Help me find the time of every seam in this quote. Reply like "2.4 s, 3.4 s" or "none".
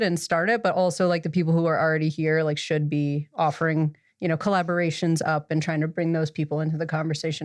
none